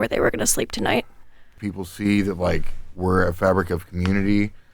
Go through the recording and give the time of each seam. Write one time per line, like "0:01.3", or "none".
0:01.6